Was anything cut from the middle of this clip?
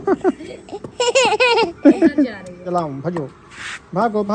yes; 1 cut; at 2.6 s

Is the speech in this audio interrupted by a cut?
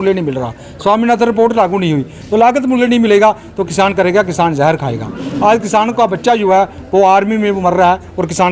no; 0 cuts

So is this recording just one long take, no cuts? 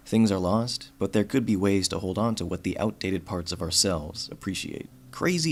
yes; 0 cuts

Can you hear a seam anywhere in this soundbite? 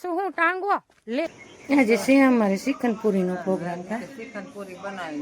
yes; 1 cut; at 1.5 s

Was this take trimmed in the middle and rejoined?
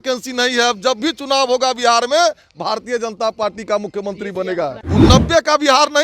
yes; 1 cut; at 4.8 s

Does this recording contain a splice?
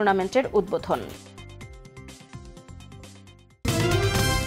yes; 1 cut; at 3.6 s

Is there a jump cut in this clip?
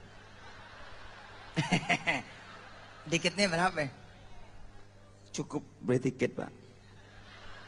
no; 0 cuts

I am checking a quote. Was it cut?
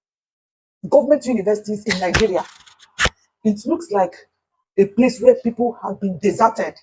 no; 0 cuts

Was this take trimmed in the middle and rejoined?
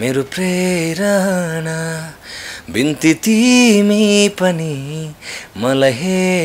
no; 0 cuts

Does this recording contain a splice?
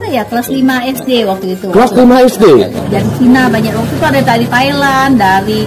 yes; 1 cut; at 2.8 s

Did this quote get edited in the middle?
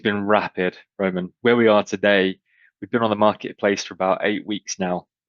yes; 1 cut; at 1.3 s

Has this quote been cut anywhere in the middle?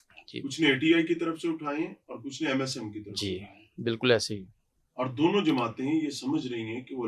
no; 0 cuts

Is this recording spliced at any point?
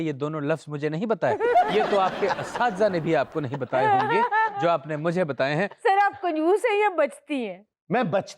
yes; 1 cut; at 5.7 s

